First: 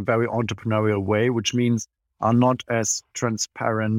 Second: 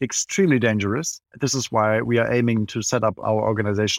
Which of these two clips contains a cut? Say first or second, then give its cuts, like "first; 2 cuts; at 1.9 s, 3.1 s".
second; 1 cut; at 1.3 s